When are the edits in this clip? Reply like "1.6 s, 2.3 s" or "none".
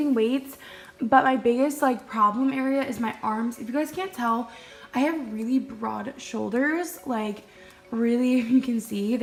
none